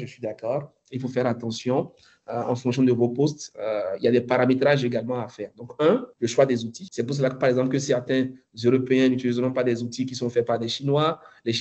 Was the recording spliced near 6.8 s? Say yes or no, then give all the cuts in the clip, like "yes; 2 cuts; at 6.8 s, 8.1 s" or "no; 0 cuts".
yes; 2 cuts; at 6.1 s, 6.8 s